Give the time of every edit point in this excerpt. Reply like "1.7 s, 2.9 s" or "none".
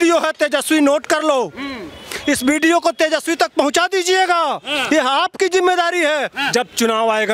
6.4 s